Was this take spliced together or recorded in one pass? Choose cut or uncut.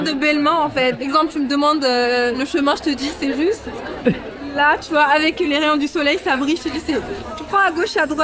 cut